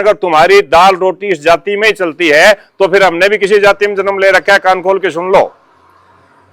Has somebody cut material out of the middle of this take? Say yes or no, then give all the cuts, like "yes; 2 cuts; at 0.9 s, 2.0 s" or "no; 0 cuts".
no; 0 cuts